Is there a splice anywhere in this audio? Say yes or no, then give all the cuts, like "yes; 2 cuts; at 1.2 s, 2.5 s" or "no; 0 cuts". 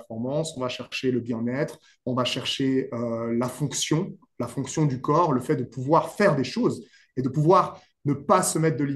no; 0 cuts